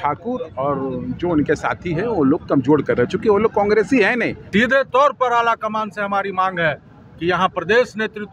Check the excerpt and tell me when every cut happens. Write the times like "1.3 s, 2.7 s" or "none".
4.4 s